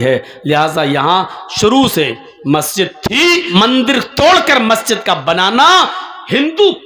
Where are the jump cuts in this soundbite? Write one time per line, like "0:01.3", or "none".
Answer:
0:03.5